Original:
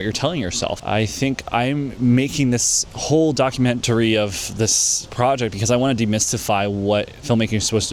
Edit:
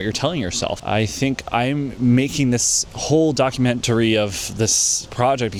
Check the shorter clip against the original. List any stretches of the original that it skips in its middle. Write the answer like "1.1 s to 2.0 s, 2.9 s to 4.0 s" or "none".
none